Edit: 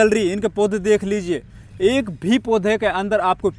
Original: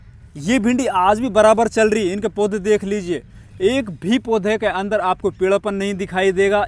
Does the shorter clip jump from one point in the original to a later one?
no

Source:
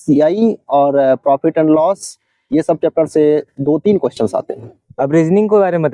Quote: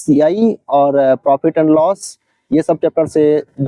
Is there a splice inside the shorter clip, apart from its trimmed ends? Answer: no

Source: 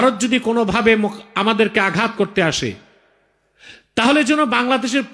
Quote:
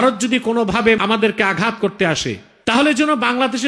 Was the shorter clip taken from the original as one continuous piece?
no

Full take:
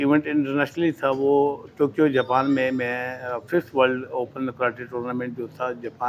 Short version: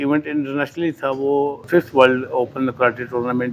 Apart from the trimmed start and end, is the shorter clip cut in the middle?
yes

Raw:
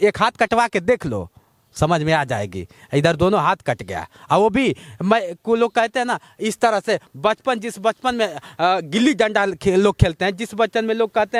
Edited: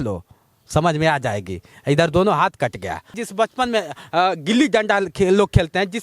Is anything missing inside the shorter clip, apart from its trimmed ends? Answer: yes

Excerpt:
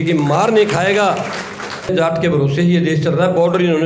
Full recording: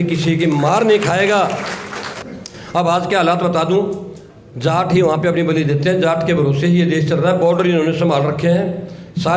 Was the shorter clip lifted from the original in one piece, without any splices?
no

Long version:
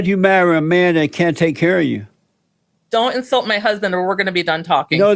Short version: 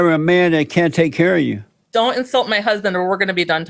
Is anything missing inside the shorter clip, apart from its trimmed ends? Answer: yes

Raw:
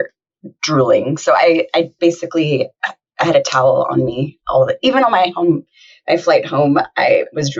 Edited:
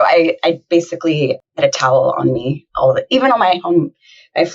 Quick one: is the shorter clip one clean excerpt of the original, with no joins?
no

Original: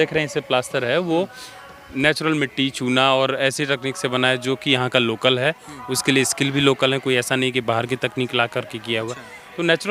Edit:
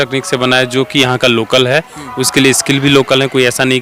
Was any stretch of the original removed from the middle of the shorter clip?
no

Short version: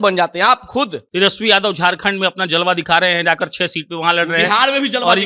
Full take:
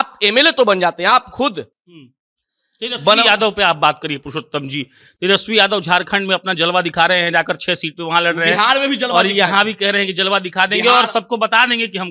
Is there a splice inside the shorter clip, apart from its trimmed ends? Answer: yes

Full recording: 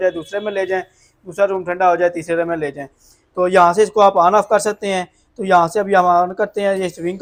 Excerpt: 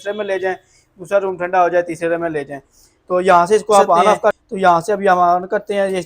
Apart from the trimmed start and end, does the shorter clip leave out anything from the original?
yes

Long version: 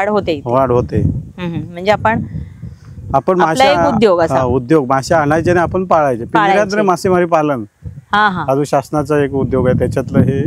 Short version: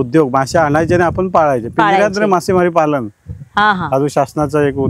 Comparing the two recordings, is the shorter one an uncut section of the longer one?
yes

